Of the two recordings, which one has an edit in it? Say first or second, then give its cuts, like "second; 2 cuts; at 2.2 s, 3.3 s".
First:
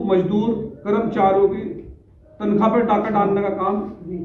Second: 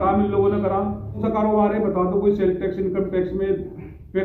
second; 1 cut; at 1.2 s